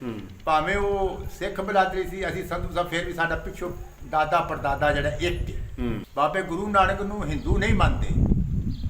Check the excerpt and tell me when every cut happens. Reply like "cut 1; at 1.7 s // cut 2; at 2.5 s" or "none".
cut 1; at 6.0 s

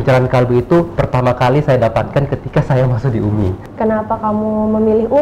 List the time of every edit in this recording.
cut 1; at 3.6 s

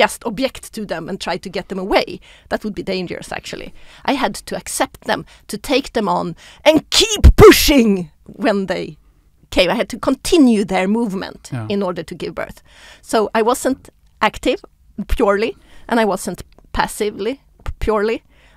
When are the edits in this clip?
none

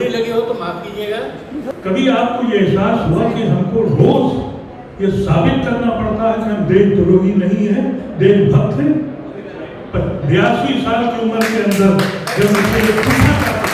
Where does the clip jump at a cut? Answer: cut 1; at 1.7 s

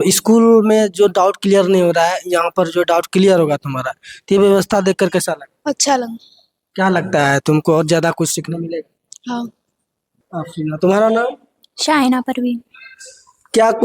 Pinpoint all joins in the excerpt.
cut 1; at 10.2 s

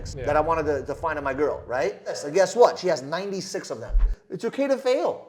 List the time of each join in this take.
cut 1; at 2.2 s // cut 2; at 4.1 s

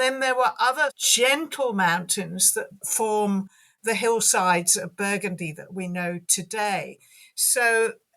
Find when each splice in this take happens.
cut 1; at 1.0 s

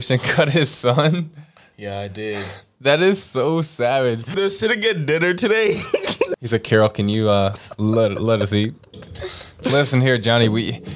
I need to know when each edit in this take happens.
cut 1; at 4.3 s // cut 2; at 6.3 s // cut 3; at 9.5 s

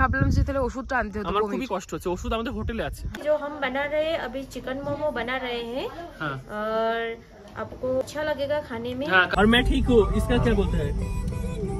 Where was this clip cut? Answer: cut 1; at 3.2 s // cut 2; at 8.0 s // cut 3; at 9.3 s

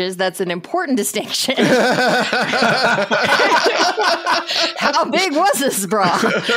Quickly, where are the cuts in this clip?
none

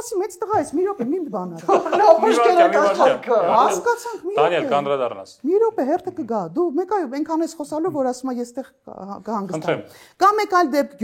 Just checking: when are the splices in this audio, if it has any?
none

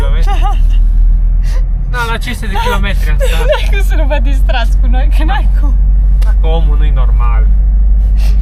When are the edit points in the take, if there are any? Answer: none

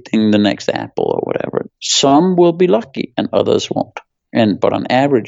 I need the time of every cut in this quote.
cut 1; at 1.6 s

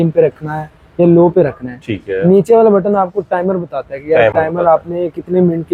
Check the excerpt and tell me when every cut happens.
none

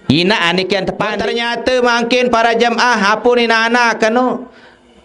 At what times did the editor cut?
cut 1; at 1.2 s

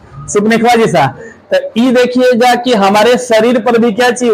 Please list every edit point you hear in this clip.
none

